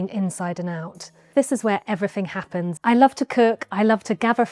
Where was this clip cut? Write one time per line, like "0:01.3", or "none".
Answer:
0:01.3